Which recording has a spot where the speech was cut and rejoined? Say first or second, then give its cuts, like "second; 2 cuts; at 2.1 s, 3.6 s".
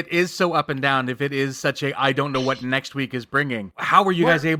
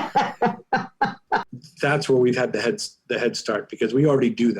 second; 1 cut; at 1.5 s